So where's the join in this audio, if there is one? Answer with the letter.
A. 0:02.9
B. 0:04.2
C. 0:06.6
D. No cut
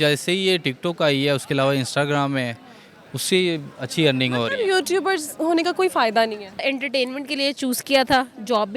C